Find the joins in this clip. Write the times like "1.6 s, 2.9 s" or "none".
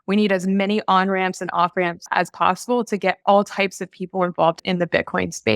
2.1 s, 4.6 s